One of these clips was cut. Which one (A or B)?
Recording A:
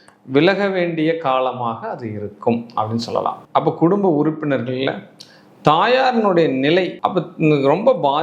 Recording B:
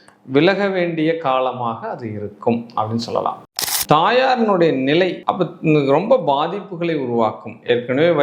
B